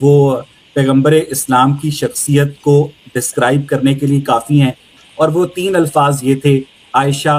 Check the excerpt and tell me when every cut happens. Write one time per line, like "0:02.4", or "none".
0:04.9